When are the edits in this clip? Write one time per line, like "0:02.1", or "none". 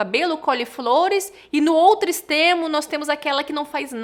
none